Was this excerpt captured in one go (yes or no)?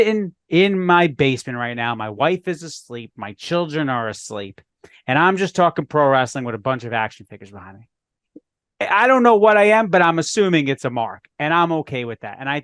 yes